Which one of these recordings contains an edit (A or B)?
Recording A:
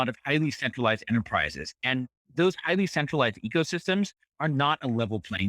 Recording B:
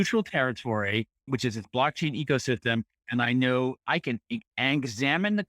B